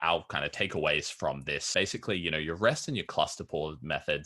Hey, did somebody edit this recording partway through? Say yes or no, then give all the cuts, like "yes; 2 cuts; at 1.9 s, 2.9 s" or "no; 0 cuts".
yes; 1 cut; at 1.7 s